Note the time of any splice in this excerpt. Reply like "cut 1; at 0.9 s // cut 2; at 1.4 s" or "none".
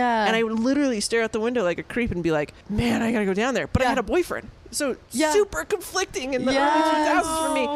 cut 1; at 2.6 s